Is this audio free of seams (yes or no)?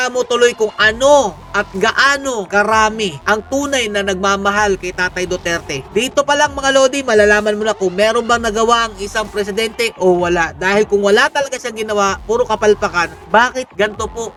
yes